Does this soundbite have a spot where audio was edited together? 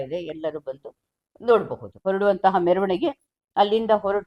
yes; 1 cut; at 2.0 s

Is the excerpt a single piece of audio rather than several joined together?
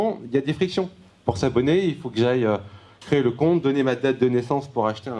yes; 0 cuts

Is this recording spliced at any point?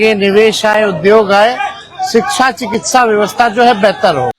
no; 0 cuts

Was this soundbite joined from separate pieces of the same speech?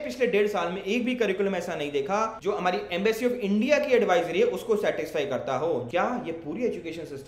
yes; 2 cuts; at 2.3 s, 5.8 s

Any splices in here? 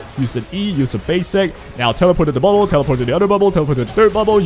no; 0 cuts

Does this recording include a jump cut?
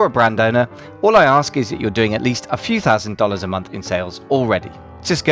no; 0 cuts

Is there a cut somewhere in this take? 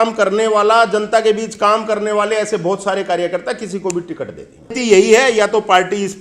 yes; 1 cut; at 4.7 s

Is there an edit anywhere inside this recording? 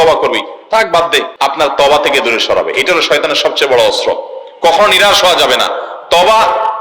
yes; 1 cut; at 1.3 s

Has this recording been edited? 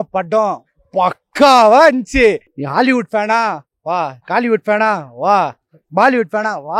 yes; 1 cut; at 2.5 s

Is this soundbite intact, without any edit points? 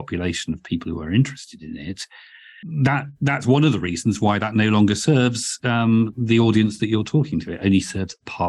yes; 0 cuts

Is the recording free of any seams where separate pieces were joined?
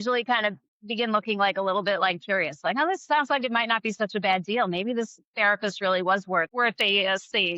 no; 1 cut; at 6.5 s

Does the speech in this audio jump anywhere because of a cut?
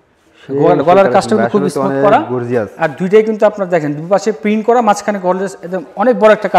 no; 0 cuts

